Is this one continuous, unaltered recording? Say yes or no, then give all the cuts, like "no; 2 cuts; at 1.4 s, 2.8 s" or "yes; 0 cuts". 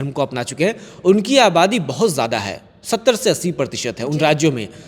yes; 0 cuts